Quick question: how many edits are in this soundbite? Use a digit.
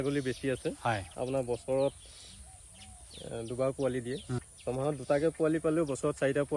2